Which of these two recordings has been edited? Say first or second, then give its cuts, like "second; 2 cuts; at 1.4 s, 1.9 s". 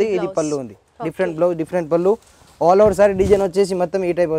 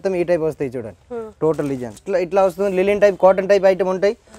second; 1 cut; at 2.0 s